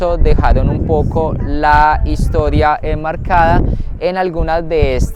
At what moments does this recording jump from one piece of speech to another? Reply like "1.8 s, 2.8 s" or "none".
none